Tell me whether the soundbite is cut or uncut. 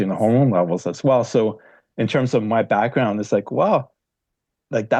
uncut